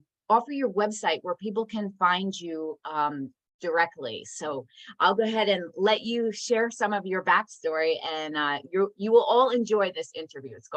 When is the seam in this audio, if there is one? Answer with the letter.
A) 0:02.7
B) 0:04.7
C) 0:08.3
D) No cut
D